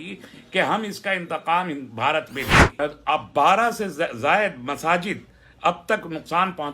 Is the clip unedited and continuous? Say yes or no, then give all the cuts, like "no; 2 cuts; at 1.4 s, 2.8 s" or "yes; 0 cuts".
no; 1 cut; at 2.7 s